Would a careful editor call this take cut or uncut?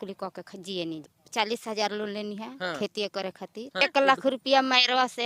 cut